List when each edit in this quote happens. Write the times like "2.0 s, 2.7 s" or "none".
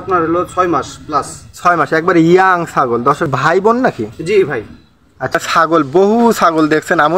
3.3 s, 5.3 s